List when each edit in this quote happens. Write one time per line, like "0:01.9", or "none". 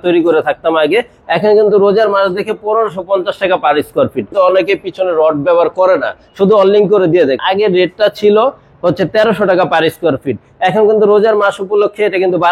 0:04.3
0:07.4